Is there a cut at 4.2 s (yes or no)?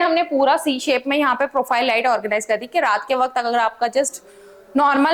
no